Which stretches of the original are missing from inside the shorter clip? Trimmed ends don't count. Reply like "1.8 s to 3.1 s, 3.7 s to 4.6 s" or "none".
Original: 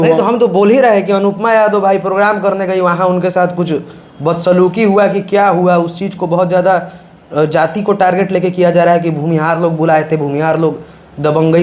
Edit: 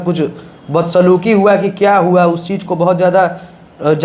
none